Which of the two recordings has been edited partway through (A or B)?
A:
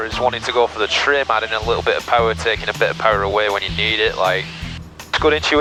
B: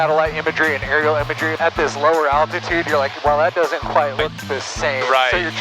B